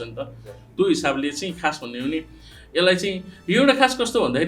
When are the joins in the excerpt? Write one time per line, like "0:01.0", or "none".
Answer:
none